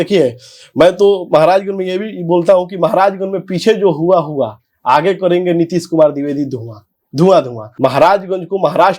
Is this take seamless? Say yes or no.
no